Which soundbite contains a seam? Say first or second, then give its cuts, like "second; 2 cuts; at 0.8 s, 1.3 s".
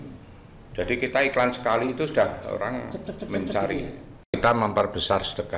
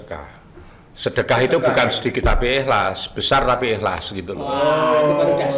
first; 1 cut; at 4.4 s